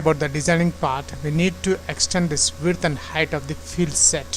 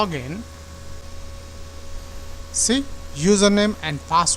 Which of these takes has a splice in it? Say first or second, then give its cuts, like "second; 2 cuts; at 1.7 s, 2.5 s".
second; 1 cut; at 1.0 s